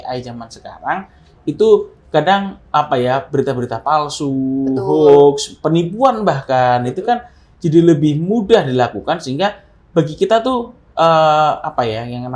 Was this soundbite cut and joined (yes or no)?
no